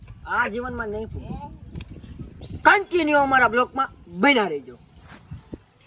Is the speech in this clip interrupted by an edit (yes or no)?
yes